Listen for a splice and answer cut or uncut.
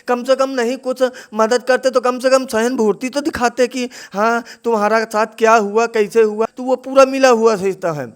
cut